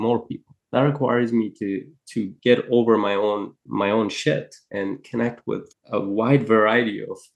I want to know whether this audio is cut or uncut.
cut